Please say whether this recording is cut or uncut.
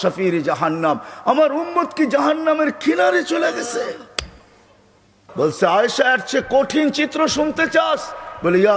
cut